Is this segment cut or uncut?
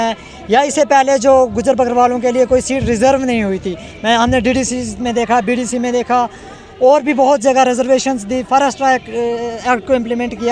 uncut